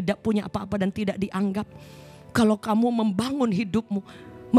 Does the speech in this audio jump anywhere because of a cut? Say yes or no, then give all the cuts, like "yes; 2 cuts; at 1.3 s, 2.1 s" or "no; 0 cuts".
no; 0 cuts